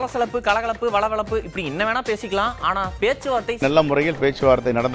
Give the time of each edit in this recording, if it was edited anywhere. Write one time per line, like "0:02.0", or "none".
0:03.6